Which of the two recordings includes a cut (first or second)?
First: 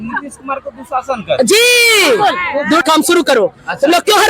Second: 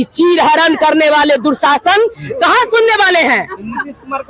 first